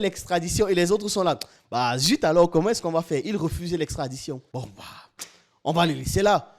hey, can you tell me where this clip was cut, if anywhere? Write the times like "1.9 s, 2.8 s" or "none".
none

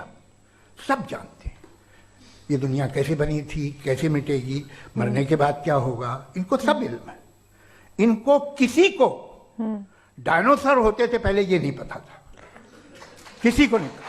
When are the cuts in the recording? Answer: none

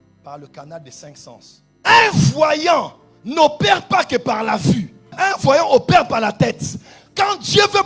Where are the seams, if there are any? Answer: 1.7 s

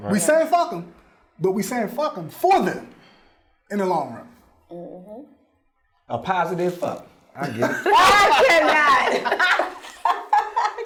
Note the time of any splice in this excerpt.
none

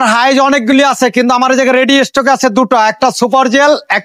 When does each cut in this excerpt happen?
none

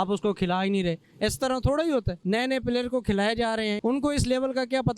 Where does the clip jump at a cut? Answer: 2.1 s, 3.8 s

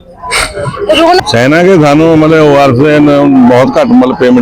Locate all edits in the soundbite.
1.2 s

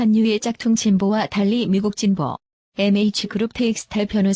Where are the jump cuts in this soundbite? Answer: none

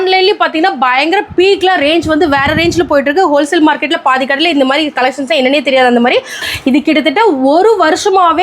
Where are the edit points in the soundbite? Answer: 6.5 s

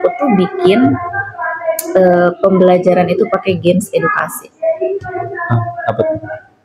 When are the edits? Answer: none

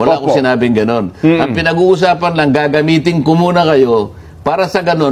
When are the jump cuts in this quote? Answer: none

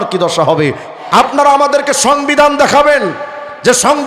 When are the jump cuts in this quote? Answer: 0.9 s

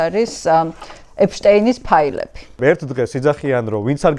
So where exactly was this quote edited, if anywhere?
2.5 s

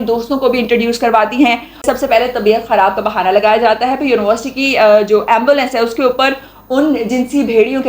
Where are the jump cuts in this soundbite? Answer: 1.8 s

